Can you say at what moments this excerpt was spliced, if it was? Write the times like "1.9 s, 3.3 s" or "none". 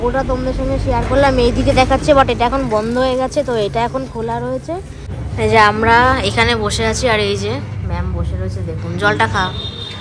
5.1 s